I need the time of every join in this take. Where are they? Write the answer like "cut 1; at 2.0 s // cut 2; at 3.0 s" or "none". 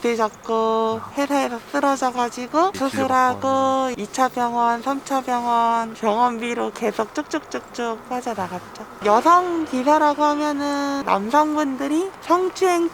cut 1; at 1.1 s // cut 2; at 8.9 s // cut 3; at 11.0 s